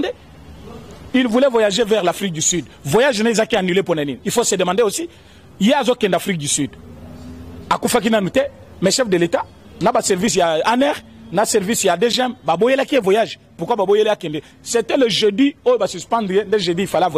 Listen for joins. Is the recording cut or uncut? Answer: uncut